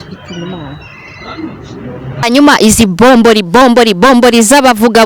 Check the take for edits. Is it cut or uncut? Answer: cut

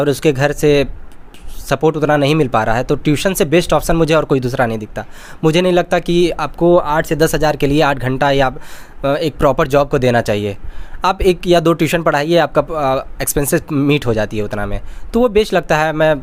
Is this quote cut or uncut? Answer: uncut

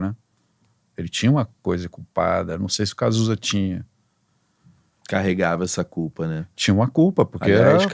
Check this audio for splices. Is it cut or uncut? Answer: uncut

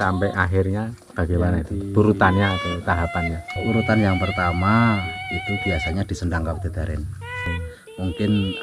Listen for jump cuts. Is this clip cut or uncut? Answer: cut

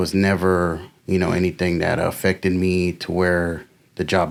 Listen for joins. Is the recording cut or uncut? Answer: uncut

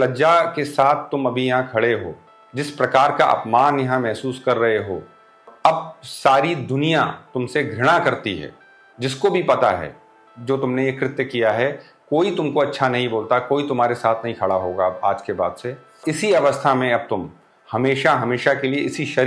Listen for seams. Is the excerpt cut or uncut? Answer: uncut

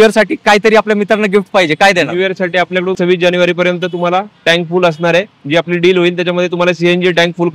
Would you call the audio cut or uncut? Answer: cut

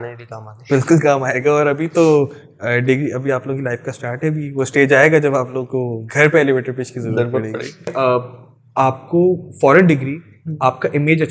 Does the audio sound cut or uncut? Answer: cut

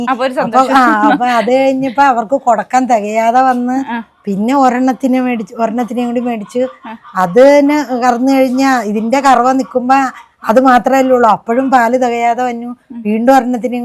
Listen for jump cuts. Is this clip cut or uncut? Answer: uncut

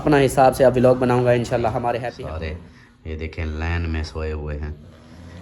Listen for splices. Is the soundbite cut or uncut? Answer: cut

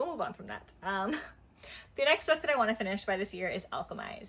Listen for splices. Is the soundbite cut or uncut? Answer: uncut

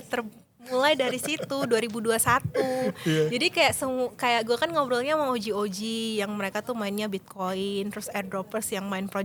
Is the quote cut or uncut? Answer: uncut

